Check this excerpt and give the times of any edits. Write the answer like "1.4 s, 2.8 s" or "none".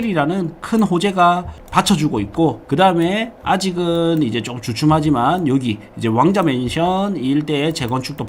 1.6 s, 2.6 s